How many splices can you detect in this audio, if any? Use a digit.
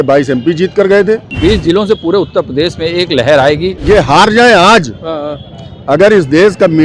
2